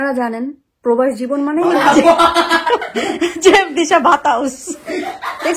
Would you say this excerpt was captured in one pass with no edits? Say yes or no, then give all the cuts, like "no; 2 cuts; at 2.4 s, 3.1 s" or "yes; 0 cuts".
no; 1 cut; at 1.7 s